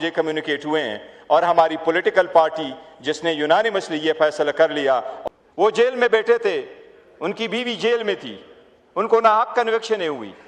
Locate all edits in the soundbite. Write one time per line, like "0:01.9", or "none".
0:05.1